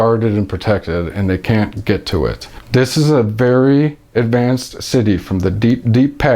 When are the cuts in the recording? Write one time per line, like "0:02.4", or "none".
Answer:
0:02.5